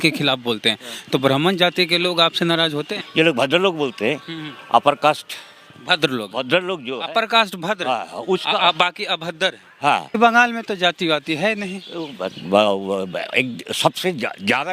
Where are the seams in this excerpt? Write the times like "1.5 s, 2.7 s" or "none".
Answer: 2.9 s, 10.2 s